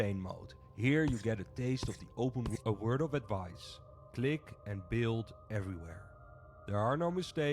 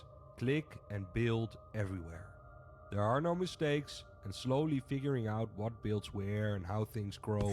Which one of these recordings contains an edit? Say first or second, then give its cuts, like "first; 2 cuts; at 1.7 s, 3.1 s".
first; 1 cut; at 2.5 s